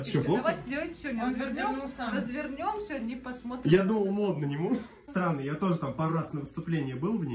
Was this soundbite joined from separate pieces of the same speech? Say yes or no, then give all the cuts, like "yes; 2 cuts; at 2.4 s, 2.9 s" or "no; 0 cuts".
yes; 1 cut; at 5.0 s